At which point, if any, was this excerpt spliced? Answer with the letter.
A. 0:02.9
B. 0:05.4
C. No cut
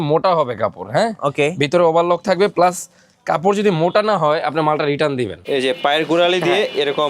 B